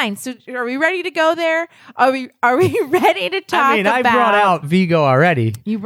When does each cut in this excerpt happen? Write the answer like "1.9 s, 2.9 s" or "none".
4.7 s

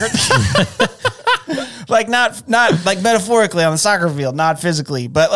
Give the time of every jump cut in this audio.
none

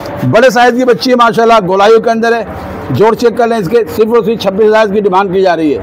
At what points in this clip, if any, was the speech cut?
none

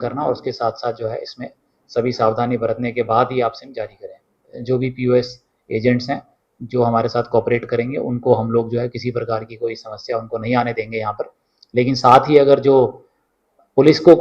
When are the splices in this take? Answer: 4.6 s

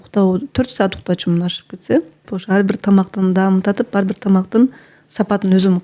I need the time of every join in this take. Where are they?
2.3 s

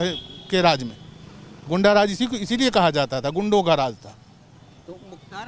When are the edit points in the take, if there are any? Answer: none

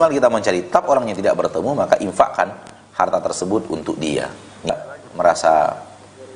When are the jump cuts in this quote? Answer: 4.7 s

